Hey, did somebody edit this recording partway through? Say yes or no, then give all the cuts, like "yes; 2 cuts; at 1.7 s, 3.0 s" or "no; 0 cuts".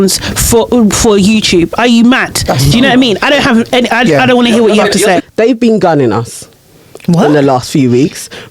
yes; 1 cut; at 5.2 s